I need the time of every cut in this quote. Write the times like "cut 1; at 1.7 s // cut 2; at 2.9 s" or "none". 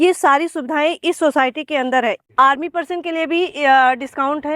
cut 1; at 2.2 s